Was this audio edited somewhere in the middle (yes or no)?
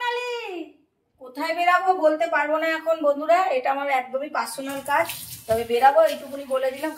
yes